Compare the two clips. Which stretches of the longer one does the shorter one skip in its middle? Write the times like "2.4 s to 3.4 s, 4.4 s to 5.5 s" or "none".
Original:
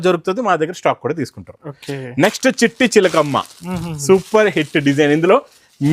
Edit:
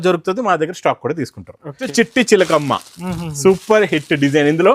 1.9 s to 2.5 s